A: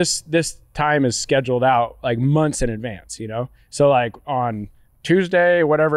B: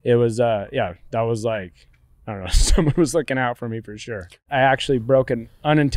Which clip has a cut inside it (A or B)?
B